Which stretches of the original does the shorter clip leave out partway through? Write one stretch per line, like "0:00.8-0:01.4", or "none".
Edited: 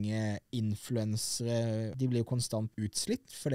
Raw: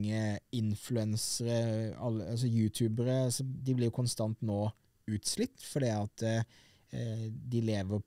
0:01.9-0:03.6
0:04.4-0:05.0